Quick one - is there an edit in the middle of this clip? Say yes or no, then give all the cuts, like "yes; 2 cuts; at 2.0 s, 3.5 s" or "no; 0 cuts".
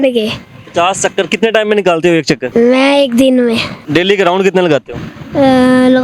yes; 2 cuts; at 2.4 s, 3.7 s